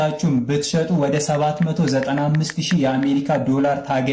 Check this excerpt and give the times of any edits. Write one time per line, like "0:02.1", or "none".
none